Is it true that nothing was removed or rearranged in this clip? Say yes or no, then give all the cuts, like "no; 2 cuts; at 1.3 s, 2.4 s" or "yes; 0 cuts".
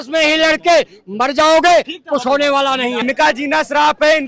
no; 1 cut; at 3.0 s